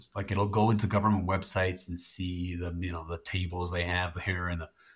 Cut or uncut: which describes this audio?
uncut